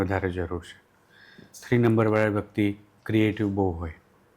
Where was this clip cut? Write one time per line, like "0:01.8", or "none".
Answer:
none

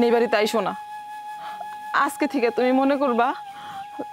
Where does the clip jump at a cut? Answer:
none

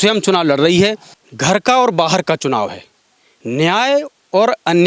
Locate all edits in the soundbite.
0:01.1

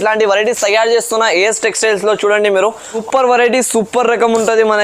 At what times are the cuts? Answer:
0:03.0

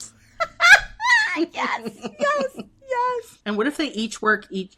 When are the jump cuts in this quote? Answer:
0:03.3

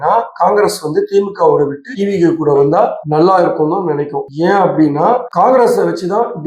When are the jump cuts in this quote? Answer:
none

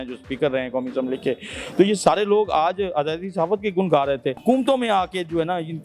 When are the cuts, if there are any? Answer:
0:04.4

